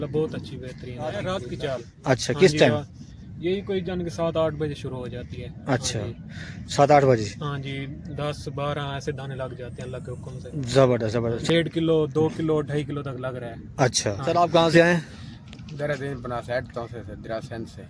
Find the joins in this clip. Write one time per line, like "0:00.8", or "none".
0:01.2
0:11.4
0:14.2